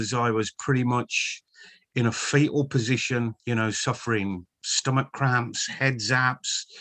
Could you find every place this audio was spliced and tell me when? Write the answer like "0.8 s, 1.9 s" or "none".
3.4 s